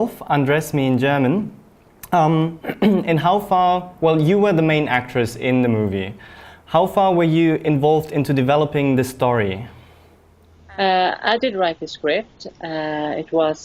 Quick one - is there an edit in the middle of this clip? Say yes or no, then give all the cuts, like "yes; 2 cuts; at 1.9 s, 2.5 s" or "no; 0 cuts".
yes; 1 cut; at 9.2 s